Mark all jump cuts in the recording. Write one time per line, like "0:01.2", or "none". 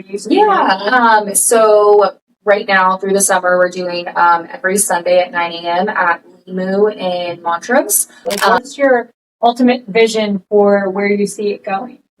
0:08.5